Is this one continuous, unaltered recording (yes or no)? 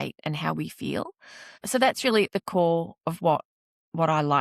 no